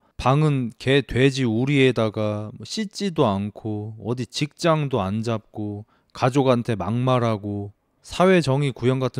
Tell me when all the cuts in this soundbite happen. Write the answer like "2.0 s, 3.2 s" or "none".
none